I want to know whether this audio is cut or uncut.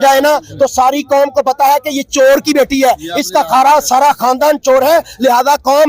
uncut